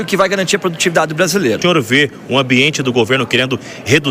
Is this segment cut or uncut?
cut